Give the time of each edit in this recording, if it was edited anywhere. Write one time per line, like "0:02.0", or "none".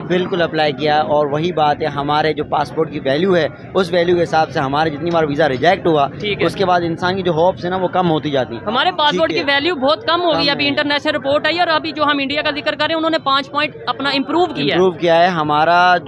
none